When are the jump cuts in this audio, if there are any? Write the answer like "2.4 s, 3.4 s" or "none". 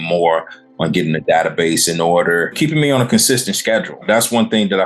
2.6 s, 4.0 s